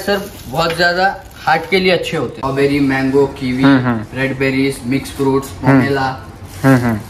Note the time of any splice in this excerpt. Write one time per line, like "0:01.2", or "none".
0:02.4